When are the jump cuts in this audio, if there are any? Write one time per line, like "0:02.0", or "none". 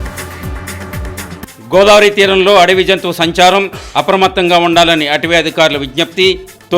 0:01.3